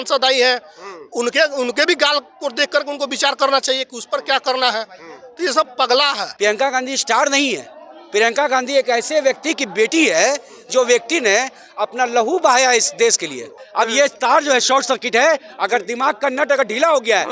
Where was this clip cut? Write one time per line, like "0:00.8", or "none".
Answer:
0:06.2
0:13.6

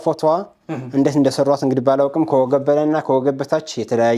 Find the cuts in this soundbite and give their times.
none

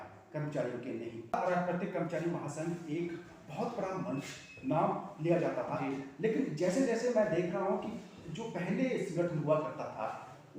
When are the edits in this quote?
0:01.3

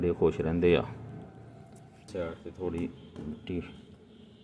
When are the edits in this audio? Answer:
0:02.1

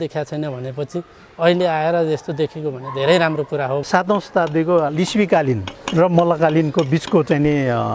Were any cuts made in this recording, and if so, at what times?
0:03.9
0:05.8

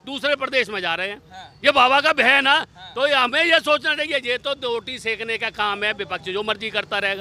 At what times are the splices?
none

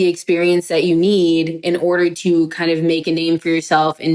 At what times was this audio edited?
none

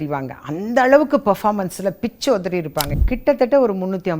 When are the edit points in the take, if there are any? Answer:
0:02.9

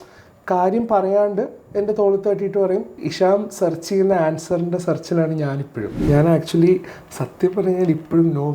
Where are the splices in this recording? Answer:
0:03.0
0:05.9

